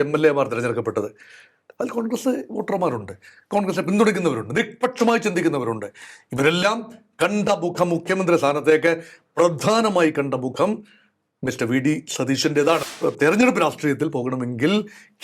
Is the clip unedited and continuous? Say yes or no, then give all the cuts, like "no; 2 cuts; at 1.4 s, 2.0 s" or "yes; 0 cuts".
no; 1 cut; at 12.8 s